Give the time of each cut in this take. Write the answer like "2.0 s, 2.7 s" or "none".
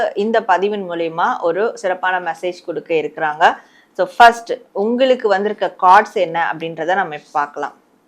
none